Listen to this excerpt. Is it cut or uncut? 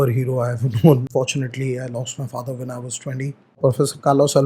cut